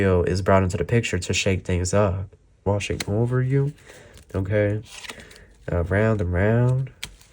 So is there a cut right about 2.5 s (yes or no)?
yes